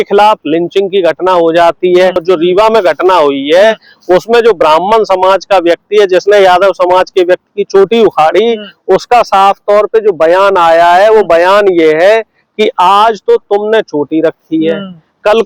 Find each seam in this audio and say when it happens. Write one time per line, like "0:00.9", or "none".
0:02.2